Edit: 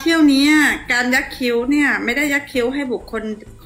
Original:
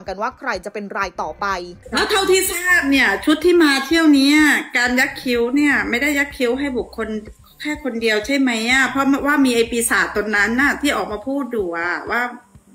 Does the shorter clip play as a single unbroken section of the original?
yes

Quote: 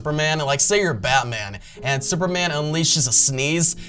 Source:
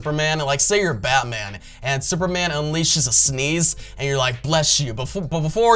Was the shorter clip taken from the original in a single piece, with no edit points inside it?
yes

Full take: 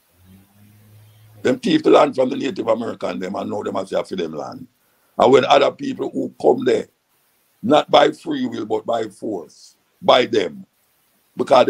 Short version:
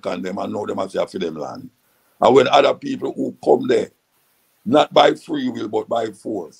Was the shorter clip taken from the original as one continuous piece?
yes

